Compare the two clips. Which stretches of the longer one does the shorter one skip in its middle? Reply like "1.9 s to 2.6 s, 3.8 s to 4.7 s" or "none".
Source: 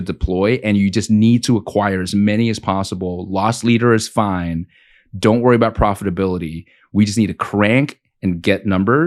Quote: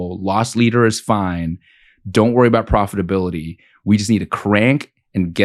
none

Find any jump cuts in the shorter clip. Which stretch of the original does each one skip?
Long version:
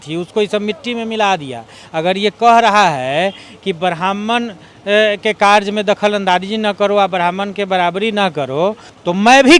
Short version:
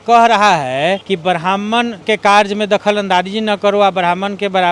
3.4 s to 3.6 s, 4.6 s to 5.2 s

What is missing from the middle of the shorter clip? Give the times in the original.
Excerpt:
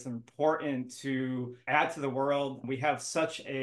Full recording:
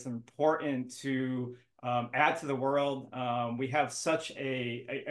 1.6 s to 2.1 s, 3.1 s to 3.5 s

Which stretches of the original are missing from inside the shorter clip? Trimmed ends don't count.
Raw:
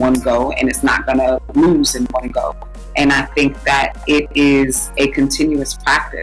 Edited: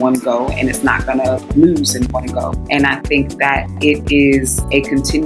2.6 s to 2.8 s

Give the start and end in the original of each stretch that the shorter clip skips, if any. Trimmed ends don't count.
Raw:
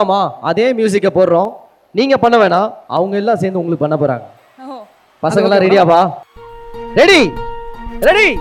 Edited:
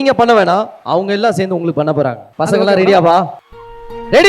4.3 s to 5.1 s

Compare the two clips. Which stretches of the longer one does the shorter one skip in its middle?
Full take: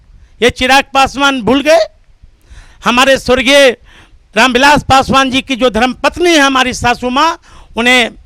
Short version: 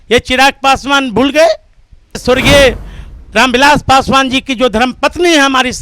2.5 s to 3.2 s

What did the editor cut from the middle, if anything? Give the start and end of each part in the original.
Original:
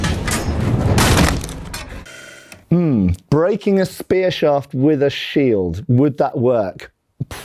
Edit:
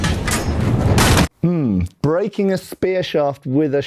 1.3 s to 2.5 s

